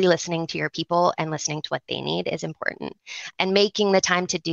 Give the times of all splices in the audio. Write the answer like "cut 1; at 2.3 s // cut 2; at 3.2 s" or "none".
cut 1; at 3.3 s